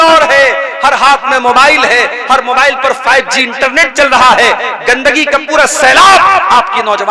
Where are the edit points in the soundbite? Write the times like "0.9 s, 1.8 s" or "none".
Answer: none